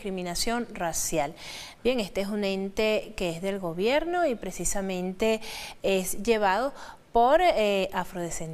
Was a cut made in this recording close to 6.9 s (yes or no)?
yes